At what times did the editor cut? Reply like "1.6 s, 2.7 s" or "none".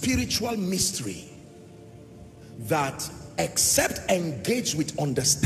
none